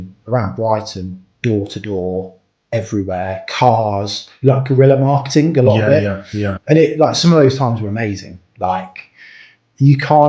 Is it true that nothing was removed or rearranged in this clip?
no; 1 cut; at 6.5 s

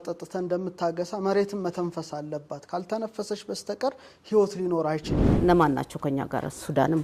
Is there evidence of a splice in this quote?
yes; 1 cut; at 5.2 s

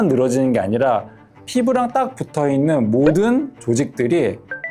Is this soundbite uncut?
yes; 0 cuts

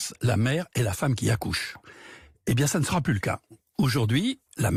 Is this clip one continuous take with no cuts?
yes; 0 cuts

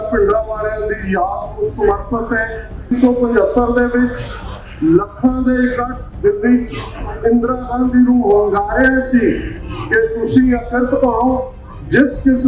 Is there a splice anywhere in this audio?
yes; 1 cut; at 2.9 s

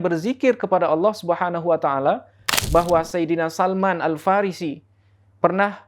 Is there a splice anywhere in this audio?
yes; 1 cut; at 2.5 s

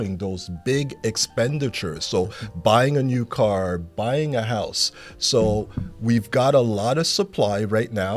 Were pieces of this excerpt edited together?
yes; 1 cut; at 3.9 s

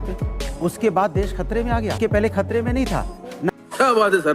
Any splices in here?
yes; 2 cuts; at 2.0 s, 3.5 s

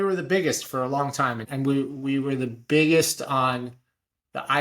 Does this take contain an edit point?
yes; 1 cut; at 1.5 s

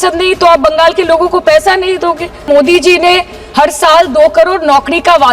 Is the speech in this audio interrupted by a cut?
yes; 1 cut; at 2.4 s

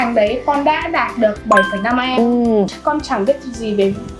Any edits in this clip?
yes; 1 cut; at 2.7 s

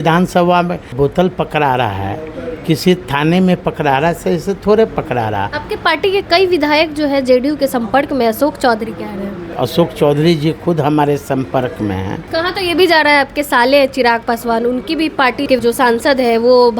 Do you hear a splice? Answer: yes; 5 cuts; at 0.9 s, 5.6 s, 9.4 s, 12.2 s, 15.5 s

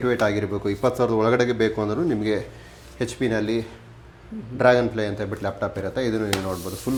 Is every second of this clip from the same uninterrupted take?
yes; 0 cuts

